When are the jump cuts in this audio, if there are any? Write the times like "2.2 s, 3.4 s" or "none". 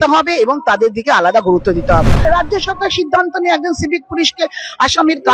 2.2 s